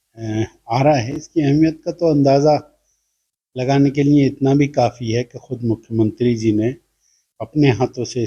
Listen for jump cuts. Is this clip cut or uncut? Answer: uncut